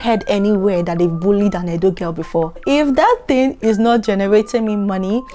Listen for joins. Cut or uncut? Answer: cut